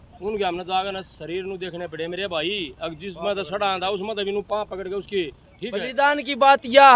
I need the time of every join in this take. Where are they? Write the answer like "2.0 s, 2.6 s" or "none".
5.9 s